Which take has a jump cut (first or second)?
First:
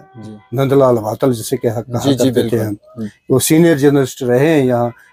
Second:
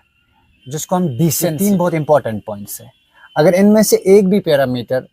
second